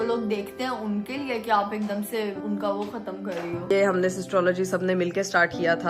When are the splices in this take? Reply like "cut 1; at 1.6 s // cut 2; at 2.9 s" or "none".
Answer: cut 1; at 2.4 s // cut 2; at 3.7 s